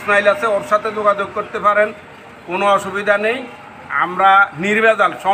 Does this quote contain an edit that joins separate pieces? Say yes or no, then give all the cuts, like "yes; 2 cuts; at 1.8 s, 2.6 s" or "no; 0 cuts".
no; 0 cuts